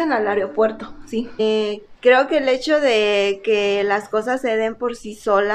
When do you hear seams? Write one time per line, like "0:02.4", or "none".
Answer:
0:01.3